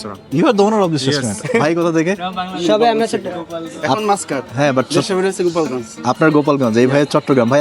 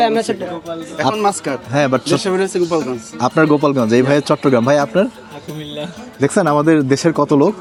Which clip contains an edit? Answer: first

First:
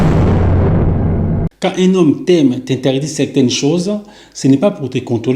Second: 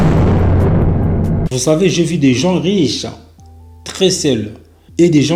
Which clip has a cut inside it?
first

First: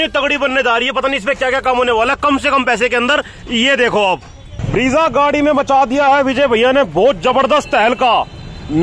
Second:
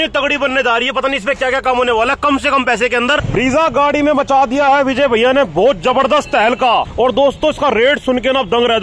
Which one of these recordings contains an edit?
second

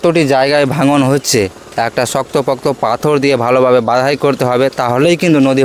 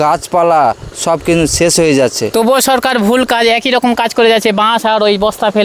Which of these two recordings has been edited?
second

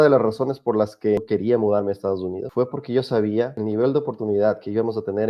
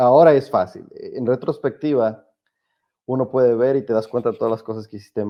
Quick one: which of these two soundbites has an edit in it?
first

